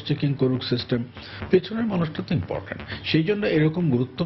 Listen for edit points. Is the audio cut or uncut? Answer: uncut